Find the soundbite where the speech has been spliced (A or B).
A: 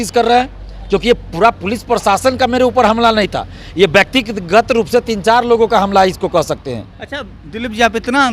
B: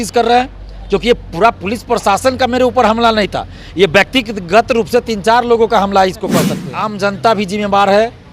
B